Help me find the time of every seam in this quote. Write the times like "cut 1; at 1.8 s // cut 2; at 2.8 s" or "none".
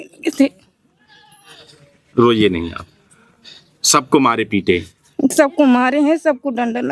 none